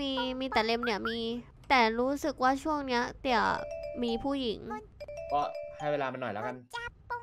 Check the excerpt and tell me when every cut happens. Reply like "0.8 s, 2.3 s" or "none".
1.5 s, 4.9 s

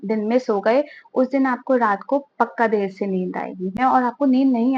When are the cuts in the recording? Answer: 3.8 s

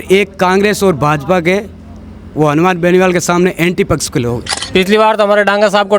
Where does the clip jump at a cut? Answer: 4.5 s

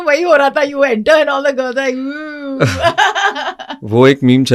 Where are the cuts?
none

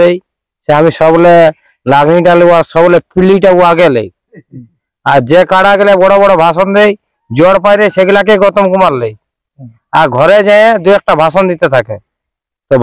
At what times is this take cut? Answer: none

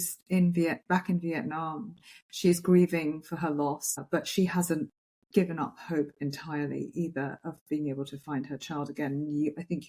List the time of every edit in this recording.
4.1 s

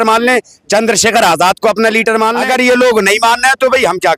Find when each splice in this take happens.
2.4 s

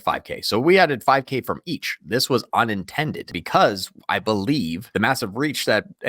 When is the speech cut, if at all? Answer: 3.3 s, 4.8 s

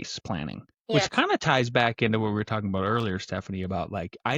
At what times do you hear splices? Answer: 0.9 s

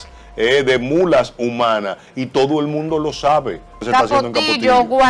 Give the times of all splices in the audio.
3.8 s

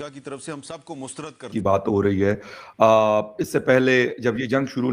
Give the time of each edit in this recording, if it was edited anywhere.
1.4 s

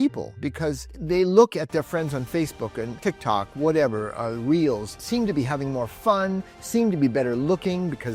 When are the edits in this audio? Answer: 0.9 s, 3.0 s, 5.0 s

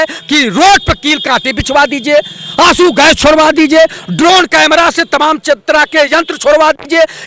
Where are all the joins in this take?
none

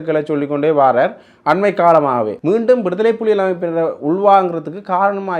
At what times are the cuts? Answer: 2.4 s

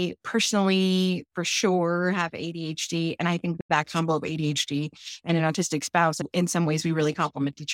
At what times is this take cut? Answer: 6.2 s

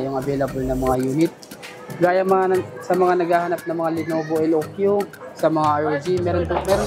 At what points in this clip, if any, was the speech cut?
none

